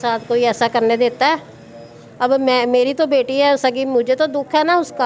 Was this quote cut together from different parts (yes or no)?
no